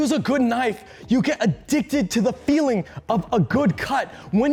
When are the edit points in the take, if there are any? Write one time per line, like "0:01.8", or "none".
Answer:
none